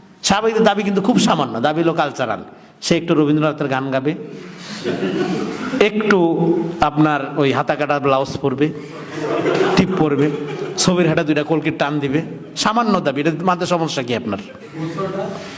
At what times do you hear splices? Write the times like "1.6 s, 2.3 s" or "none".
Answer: none